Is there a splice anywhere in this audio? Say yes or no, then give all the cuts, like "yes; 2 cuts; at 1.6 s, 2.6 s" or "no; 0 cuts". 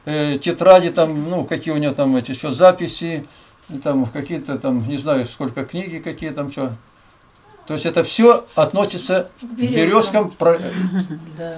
no; 0 cuts